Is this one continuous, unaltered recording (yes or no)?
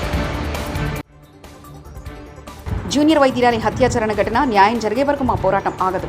no